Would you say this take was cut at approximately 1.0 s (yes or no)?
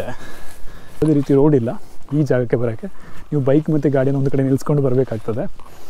yes